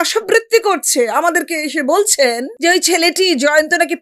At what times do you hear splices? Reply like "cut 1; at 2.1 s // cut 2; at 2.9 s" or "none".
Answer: cut 1; at 2.5 s